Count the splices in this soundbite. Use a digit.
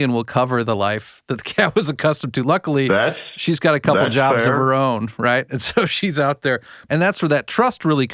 1